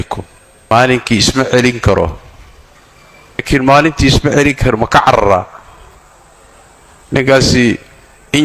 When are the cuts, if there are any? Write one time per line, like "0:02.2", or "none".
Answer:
0:00.7
0:03.4